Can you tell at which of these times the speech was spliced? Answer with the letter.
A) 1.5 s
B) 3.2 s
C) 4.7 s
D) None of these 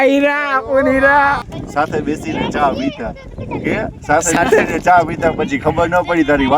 A